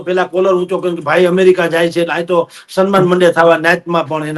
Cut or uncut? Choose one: uncut